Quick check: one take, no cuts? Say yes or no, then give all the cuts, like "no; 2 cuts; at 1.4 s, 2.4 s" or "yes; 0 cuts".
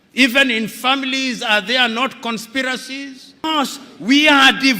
no; 1 cut; at 3.4 s